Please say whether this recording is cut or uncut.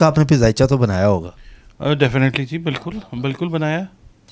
uncut